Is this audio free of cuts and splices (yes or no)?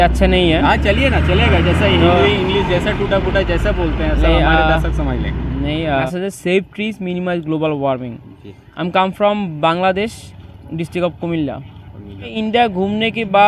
no